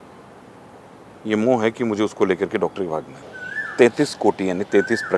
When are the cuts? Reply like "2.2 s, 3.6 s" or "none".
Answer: 3.1 s